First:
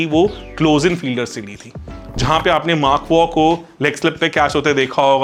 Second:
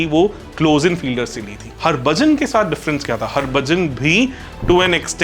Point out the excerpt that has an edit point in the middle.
second; 1 cut; at 1.6 s

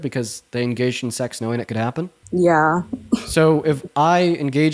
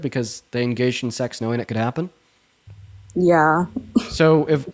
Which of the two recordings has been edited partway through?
first; 1 cut; at 2.2 s

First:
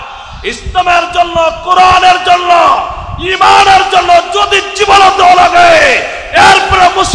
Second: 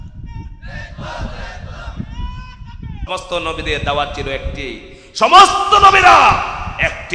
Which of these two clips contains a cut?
second; 1 cut; at 3.0 s

